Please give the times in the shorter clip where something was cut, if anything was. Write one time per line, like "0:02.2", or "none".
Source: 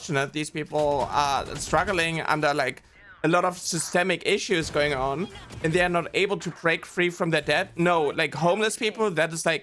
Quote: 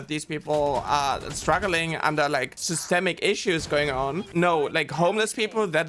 0:02.7
0:04.3